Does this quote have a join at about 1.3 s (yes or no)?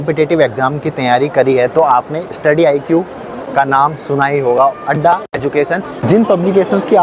no